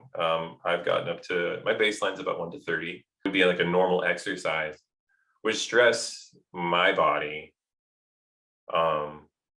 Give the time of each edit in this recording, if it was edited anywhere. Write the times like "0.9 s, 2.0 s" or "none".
3.3 s